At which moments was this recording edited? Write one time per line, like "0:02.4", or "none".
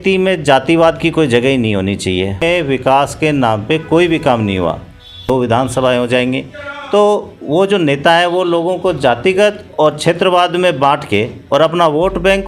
0:02.4
0:05.2